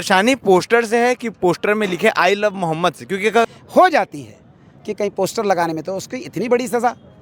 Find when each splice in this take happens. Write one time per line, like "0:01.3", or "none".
0:03.5